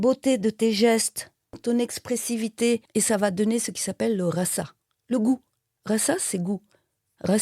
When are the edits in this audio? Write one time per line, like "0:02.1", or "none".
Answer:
0:01.6